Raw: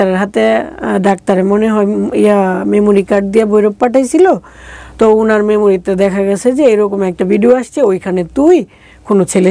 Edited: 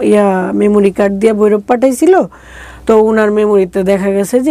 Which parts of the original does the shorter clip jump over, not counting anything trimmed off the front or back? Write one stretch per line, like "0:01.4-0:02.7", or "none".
none